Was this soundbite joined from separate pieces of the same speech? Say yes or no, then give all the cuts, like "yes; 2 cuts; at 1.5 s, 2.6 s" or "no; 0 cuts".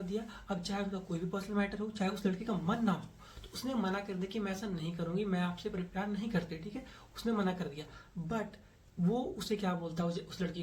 yes; 1 cut; at 8.7 s